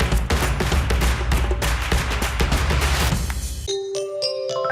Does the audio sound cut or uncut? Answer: cut